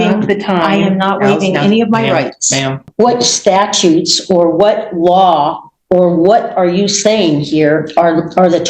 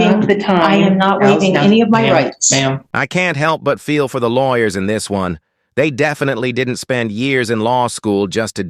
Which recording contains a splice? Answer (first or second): first